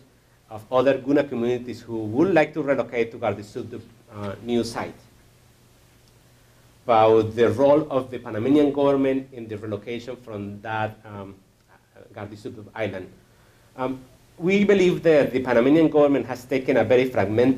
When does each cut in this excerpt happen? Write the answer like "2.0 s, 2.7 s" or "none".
none